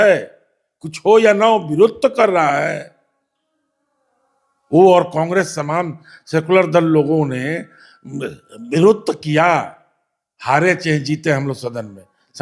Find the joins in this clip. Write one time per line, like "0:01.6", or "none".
none